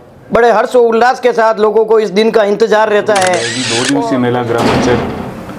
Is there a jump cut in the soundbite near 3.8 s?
yes; 1 cut; at 3.8 s

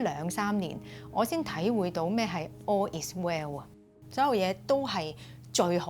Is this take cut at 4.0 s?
yes; 1 cut; at 4.0 s

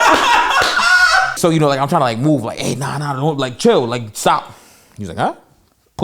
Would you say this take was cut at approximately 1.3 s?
yes; 1 cut; at 1.3 s

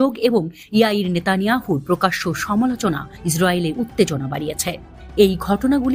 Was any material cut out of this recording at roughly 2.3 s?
no; 0 cuts

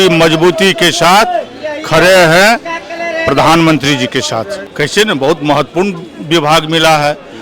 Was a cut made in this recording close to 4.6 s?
yes; 1 cut; at 4.6 s

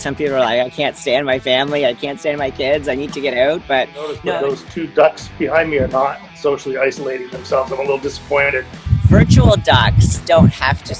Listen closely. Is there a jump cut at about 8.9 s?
yes; 2 cuts; at 4.2 s, 8.9 s

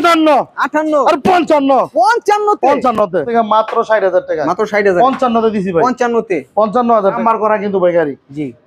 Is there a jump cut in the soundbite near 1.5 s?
no; 2 cuts; at 3.2 s, 7.2 s

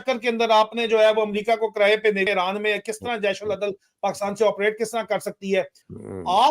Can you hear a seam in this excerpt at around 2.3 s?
yes; 1 cut; at 2.3 s

